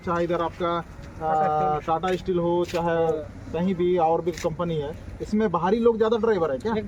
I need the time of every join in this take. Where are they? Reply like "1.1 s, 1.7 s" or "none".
none